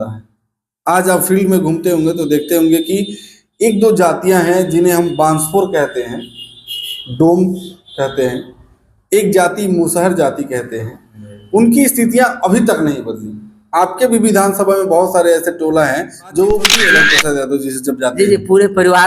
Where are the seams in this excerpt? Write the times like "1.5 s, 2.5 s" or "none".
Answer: 16.9 s